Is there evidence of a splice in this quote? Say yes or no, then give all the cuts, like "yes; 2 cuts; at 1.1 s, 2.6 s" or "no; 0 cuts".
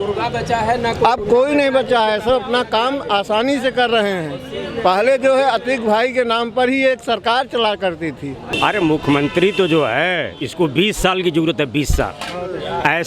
yes; 1 cut; at 8.5 s